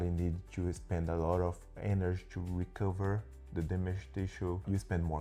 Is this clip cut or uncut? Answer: uncut